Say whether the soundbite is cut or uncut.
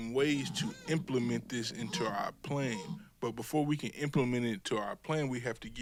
uncut